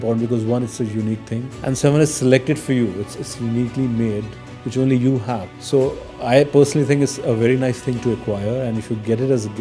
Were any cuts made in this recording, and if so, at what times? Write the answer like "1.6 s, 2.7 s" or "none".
1.5 s, 5.5 s